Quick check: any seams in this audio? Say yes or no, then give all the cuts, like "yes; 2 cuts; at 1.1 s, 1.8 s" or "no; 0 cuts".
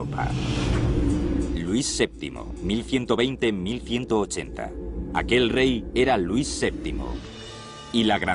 no; 0 cuts